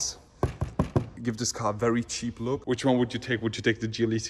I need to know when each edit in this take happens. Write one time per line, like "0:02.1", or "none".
0:01.1
0:02.6